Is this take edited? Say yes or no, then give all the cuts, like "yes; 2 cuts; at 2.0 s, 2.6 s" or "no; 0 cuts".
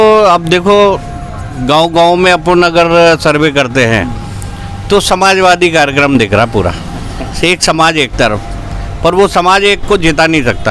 no; 0 cuts